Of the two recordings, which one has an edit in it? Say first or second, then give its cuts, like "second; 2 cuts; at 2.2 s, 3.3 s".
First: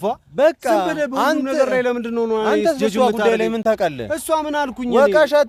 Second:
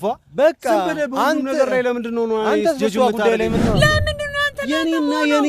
second; 1 cut; at 3.6 s